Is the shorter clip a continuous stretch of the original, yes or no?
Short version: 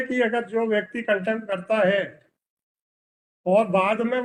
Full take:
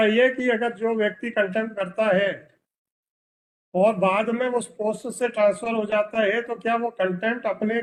yes